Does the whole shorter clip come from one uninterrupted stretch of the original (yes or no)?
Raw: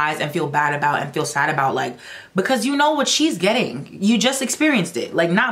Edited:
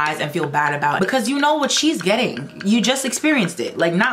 no